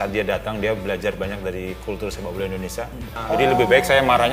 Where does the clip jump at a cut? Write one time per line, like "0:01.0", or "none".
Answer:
0:03.1